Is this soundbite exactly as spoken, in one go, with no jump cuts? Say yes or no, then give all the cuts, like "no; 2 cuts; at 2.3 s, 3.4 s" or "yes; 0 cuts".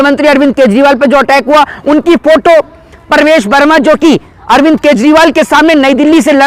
yes; 0 cuts